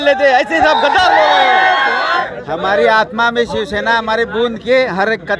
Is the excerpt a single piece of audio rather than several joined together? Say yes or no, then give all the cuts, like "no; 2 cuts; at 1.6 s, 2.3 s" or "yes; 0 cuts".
yes; 0 cuts